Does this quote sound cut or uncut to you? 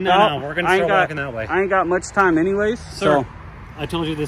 uncut